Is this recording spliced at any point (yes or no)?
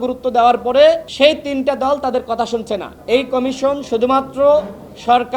yes